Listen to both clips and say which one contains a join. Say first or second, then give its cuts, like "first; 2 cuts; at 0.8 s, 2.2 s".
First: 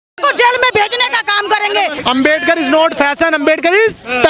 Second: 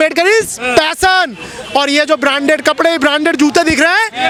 first; 1 cut; at 2.0 s